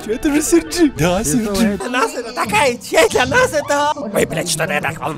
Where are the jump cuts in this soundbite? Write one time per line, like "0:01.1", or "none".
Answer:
0:01.8
0:03.1
0:04.0